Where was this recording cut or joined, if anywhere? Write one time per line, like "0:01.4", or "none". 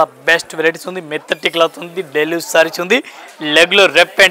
none